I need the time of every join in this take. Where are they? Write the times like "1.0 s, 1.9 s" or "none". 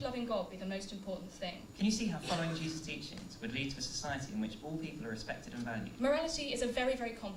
1.6 s, 5.9 s